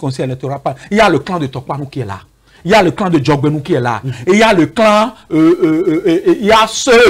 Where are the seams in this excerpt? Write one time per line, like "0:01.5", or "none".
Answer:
none